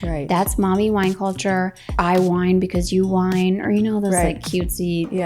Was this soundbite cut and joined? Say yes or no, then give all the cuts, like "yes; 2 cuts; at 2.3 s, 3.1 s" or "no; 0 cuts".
yes; 1 cut; at 2.0 s